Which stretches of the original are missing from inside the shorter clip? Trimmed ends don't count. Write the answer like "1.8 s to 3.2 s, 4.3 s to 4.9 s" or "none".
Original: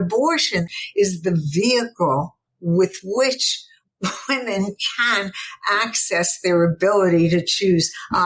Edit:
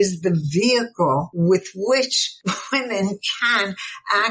2.3 s to 2.6 s, 3.5 s to 3.8 s